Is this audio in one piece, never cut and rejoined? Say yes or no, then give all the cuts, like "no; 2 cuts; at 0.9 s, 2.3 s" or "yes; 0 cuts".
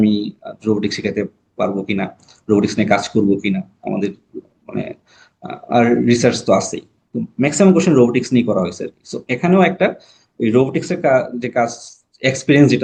yes; 0 cuts